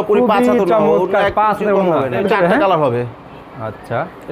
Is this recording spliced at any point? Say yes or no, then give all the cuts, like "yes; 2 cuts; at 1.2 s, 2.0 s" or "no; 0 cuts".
yes; 1 cut; at 2.2 s